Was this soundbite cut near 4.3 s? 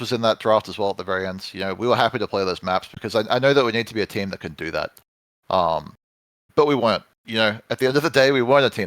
no; 0 cuts

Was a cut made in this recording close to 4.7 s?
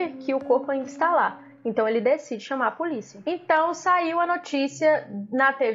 no; 1 cut; at 3.1 s

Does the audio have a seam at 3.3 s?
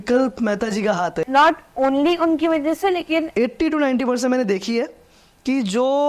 yes; 2 cuts; at 1.2 s, 3.3 s

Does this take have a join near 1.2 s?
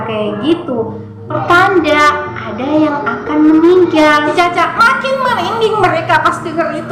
no; 1 cut; at 4.3 s

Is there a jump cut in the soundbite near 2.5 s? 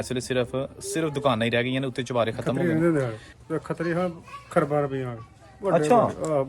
yes; 1 cut; at 2.5 s

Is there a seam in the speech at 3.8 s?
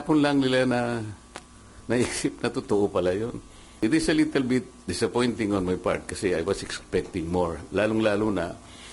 yes; 1 cut; at 3.8 s

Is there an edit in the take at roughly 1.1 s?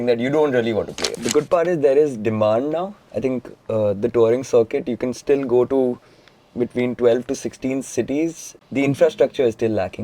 yes; 2 cuts; at 1.1 s, 8.5 s

